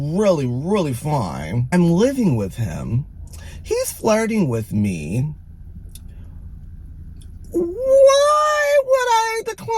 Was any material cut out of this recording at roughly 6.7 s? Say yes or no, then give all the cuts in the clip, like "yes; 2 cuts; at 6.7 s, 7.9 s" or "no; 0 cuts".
no; 1 cut; at 1.6 s